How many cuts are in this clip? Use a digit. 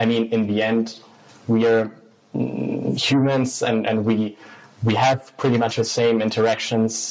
0